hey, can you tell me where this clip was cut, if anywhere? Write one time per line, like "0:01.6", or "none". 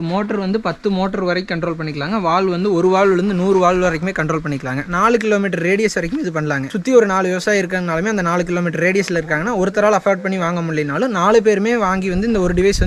none